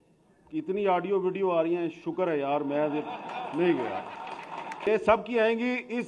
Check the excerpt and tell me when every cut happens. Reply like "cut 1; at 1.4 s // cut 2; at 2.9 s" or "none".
cut 1; at 4.9 s